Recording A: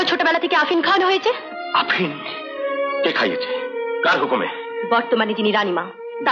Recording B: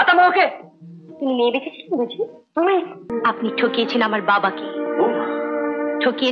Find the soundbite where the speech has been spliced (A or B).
B